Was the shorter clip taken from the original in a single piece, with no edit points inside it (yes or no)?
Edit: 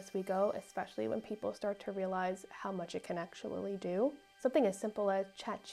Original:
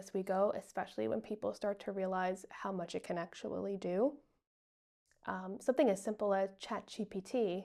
no